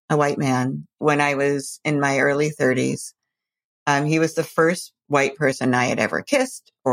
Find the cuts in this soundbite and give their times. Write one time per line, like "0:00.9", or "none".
0:01.0